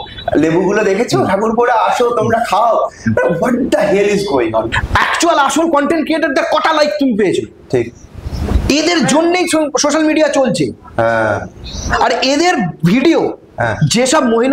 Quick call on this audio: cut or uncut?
cut